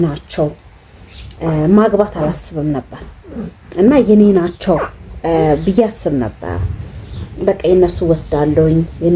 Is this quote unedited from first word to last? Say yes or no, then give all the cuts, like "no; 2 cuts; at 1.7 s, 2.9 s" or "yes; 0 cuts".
yes; 0 cuts